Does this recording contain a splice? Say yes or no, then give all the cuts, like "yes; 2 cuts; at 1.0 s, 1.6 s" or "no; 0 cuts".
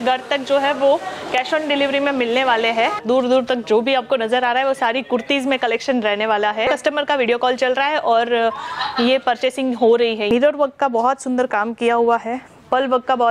yes; 3 cuts; at 3.0 s, 6.7 s, 10.3 s